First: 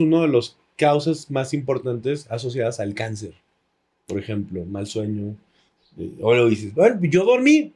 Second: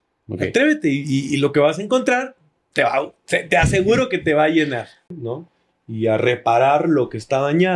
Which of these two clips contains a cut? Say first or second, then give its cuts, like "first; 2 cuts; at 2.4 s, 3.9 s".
second; 1 cut; at 5.1 s